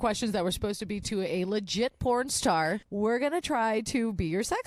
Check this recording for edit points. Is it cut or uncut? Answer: cut